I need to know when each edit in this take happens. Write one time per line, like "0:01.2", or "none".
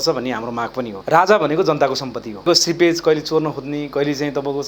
0:00.9
0:02.4